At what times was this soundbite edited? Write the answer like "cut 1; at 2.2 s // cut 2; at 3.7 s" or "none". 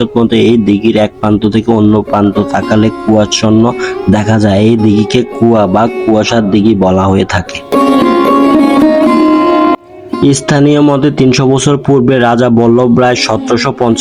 none